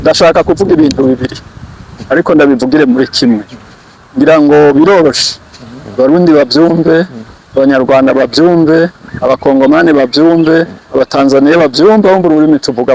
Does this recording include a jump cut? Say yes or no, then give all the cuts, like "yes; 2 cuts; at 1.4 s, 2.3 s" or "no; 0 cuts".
no; 0 cuts